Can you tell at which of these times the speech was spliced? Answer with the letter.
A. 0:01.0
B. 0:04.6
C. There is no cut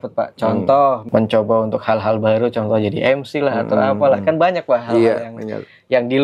A